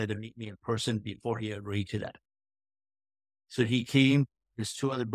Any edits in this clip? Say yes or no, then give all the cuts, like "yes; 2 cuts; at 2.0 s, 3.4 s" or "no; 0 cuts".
no; 0 cuts